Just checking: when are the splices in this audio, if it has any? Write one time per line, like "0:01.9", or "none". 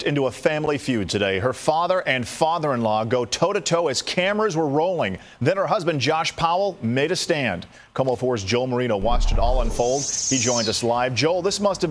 none